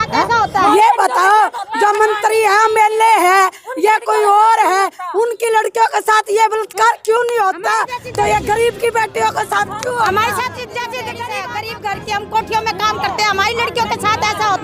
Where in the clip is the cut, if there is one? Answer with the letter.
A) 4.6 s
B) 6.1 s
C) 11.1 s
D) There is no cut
C